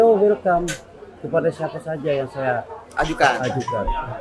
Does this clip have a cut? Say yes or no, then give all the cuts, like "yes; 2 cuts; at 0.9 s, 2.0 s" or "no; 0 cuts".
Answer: no; 0 cuts